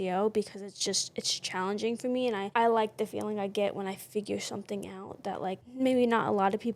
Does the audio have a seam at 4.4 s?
no; 2 cuts; at 2.5 s, 5.7 s

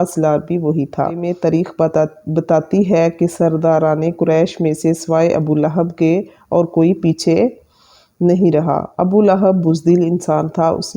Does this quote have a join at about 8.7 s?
no; 1 cut; at 1.3 s

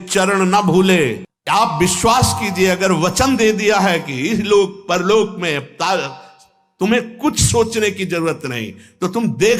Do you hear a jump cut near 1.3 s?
yes; 1 cut; at 1.3 s

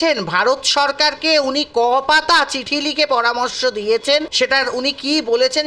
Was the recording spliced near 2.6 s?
no; 1 cut; at 4.3 s

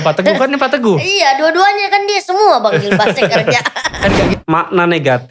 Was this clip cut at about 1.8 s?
no; 1 cut; at 4.3 s

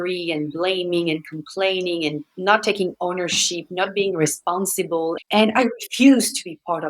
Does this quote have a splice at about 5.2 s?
yes; 1 cut; at 5.2 s

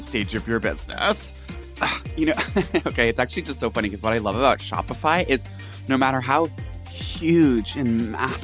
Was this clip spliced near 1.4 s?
yes; 1 cut; at 1.4 s

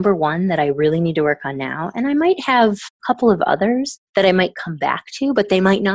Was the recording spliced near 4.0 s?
yes; 2 cuts; at 2.9 s, 4.0 s

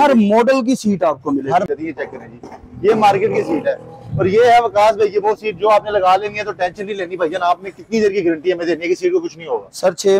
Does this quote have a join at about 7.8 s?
no; 1 cut; at 1.7 s

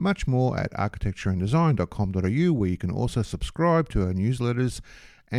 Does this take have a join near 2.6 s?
no; 0 cuts

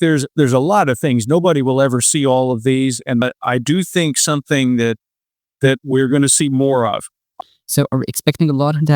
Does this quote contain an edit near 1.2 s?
no; 2 cuts; at 3.2 s, 7.3 s

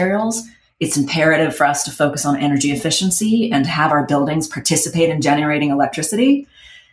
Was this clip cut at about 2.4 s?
no; 0 cuts

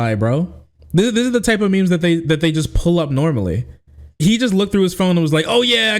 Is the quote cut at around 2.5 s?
no; 1 cut; at 4.1 s

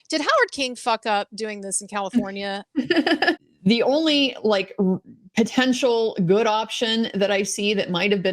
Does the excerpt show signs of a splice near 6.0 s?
no; 1 cut; at 3.4 s

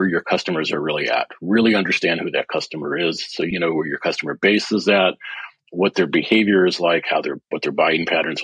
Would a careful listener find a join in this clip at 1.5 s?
no; 1 cut; at 3.5 s

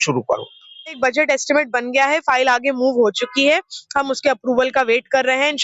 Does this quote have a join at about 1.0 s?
yes; 1 cut; at 1.0 s

